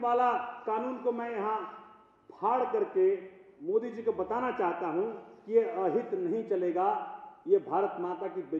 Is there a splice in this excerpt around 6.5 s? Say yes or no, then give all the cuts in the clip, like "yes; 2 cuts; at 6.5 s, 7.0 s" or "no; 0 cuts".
no; 0 cuts